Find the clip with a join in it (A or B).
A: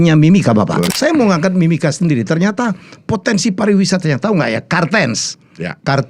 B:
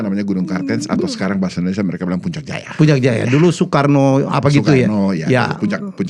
A